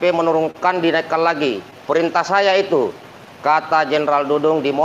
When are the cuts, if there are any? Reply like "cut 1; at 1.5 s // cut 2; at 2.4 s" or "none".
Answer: none